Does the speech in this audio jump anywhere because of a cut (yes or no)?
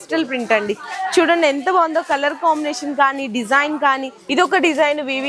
yes